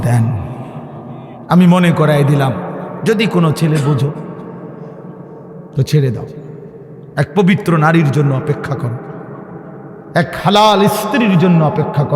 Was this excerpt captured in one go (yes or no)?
yes